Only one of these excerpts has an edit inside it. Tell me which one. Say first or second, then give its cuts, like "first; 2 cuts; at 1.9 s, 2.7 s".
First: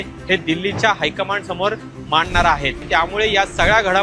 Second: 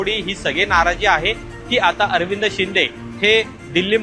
first; 1 cut; at 2.8 s